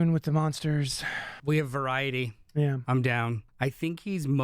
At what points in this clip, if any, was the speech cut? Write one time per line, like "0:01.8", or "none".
0:01.4
0:03.4